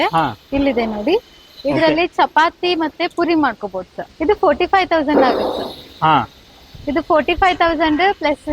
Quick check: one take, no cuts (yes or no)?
no